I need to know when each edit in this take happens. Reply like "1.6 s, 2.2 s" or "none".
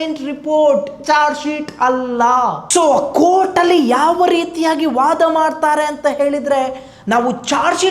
none